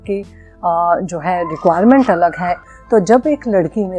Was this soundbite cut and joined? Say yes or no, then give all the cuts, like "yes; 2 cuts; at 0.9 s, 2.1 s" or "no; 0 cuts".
yes; 1 cut; at 2.6 s